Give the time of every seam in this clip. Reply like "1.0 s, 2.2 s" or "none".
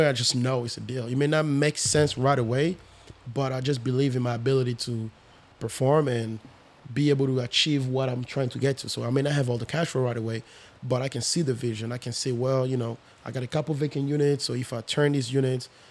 none